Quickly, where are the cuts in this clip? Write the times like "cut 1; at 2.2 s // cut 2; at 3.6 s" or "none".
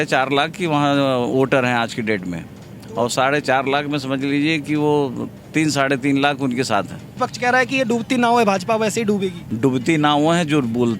cut 1; at 7.1 s // cut 2; at 9.4 s